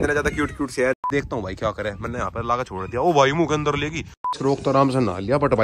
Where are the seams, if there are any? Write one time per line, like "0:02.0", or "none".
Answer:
0:01.0
0:04.3